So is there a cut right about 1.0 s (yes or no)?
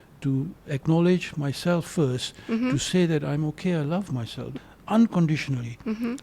no